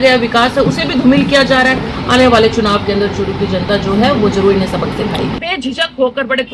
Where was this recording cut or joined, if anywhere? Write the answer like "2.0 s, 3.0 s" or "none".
1.9 s, 5.3 s